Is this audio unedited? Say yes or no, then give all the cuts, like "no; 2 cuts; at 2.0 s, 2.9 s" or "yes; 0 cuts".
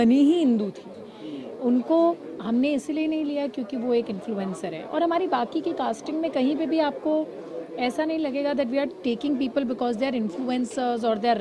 yes; 0 cuts